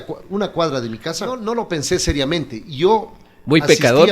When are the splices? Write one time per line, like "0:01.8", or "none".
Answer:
0:01.4